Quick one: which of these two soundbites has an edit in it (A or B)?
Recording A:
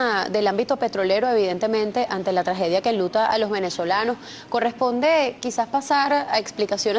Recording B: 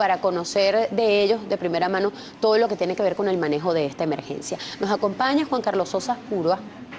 A